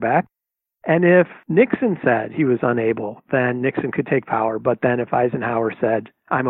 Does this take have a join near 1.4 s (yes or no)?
yes